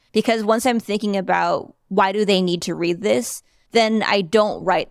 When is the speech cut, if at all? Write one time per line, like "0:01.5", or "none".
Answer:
none